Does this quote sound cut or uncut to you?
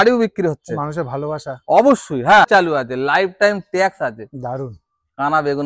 cut